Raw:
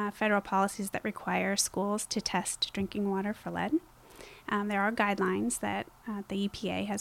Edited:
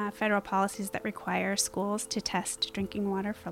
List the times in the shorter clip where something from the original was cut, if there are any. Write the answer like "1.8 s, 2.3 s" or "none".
none